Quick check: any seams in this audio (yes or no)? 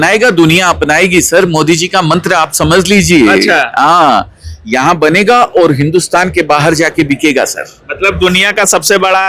no